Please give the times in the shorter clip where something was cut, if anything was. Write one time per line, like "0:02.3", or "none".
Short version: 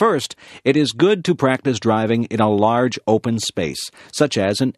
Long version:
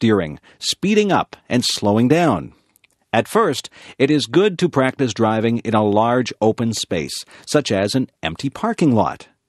none